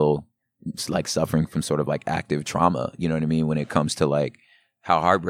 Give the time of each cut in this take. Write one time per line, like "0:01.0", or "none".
none